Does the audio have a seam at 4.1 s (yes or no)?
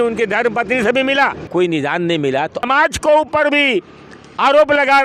no